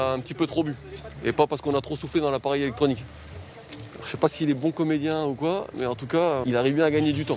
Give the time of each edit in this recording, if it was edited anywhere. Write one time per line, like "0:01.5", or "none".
0:06.4